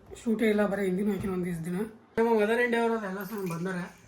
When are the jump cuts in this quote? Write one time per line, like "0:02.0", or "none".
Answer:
0:02.1